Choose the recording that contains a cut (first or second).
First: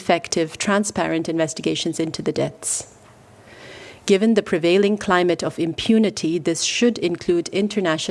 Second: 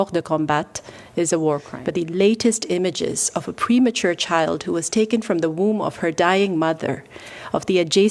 second